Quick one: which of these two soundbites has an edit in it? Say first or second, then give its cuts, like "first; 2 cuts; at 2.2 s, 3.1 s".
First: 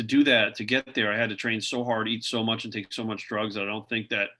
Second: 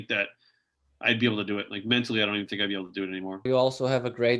second; 1 cut; at 3.5 s